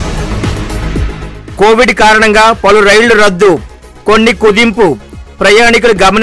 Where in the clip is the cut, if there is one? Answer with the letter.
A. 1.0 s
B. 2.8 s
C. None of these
C